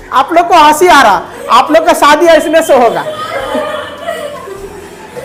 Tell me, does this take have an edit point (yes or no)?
no